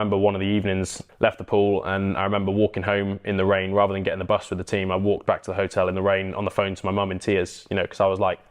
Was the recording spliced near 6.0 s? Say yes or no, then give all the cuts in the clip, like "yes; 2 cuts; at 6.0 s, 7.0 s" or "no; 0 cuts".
no; 1 cut; at 1.0 s